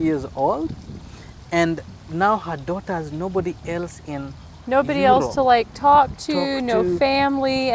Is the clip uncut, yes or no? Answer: yes